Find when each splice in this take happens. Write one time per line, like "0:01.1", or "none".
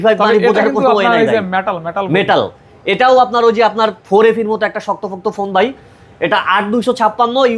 none